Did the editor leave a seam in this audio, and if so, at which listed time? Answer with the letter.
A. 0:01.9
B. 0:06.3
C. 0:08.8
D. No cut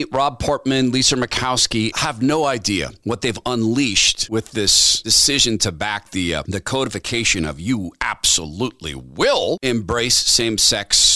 A